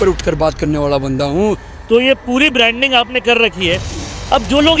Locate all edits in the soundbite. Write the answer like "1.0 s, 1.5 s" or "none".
1.6 s